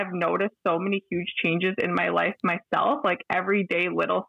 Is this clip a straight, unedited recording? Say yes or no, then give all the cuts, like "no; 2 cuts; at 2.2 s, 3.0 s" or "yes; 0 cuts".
yes; 0 cuts